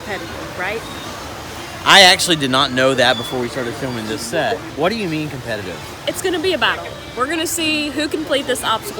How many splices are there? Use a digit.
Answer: 1